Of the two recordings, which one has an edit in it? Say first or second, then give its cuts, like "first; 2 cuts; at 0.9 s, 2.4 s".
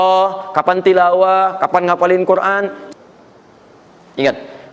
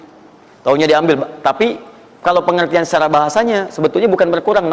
first; 1 cut; at 2.8 s